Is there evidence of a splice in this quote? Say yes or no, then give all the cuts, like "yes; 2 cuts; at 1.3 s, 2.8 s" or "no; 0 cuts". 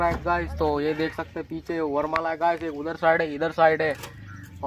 no; 0 cuts